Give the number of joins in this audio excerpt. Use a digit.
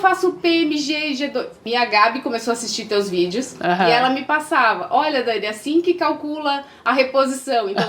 1